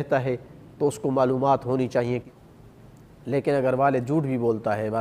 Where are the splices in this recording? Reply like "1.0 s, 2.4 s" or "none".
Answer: 2.3 s